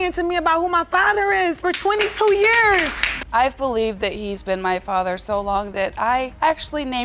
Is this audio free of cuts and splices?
no; 1 cut; at 3.1 s

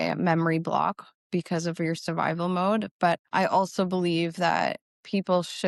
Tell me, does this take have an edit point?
no; 0 cuts

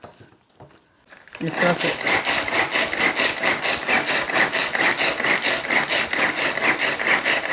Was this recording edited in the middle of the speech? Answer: yes; 1 cut; at 1.0 s

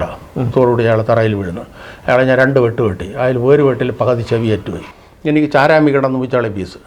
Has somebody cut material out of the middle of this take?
yes; 1 cut; at 4.8 s

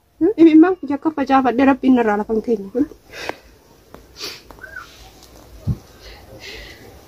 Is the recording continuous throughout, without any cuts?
no; 1 cut; at 3.1 s

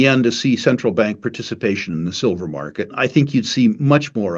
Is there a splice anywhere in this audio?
yes; 1 cut; at 2.9 s

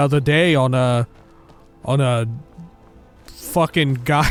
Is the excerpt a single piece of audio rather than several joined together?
yes; 0 cuts

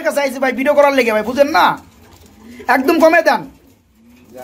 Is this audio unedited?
yes; 0 cuts

